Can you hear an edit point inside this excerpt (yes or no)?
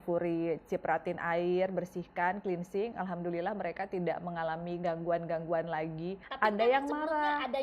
yes